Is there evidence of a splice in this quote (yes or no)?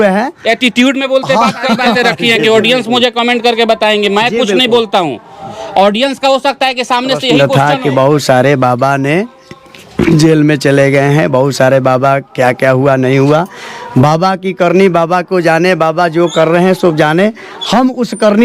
yes